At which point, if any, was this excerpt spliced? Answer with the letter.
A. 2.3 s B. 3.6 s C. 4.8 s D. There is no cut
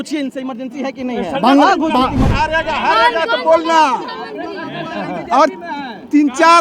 A